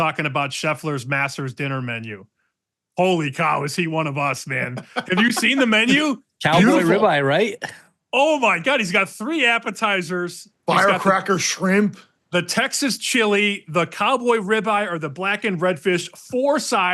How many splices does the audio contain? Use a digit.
0